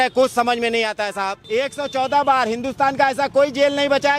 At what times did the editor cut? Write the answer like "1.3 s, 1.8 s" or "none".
1.4 s

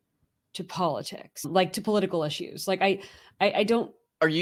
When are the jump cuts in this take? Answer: none

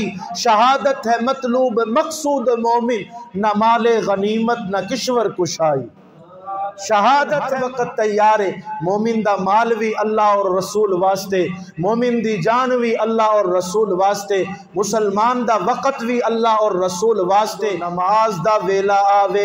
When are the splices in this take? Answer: 7.5 s, 17.8 s

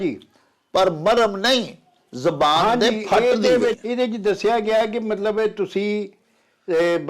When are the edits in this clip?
3.8 s

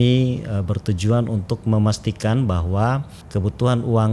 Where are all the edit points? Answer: 3.2 s

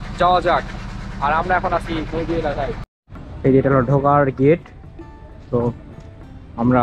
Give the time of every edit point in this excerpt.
3.4 s

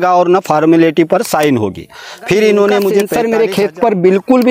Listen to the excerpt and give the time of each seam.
2.9 s

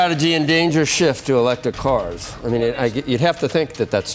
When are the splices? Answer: none

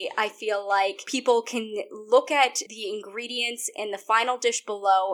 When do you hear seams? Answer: 1.1 s, 2.7 s

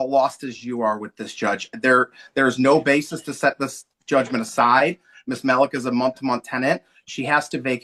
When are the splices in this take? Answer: none

